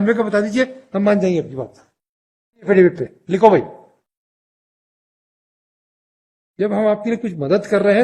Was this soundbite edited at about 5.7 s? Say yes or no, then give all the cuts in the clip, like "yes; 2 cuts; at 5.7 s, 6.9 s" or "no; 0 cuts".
no; 1 cut; at 2.7 s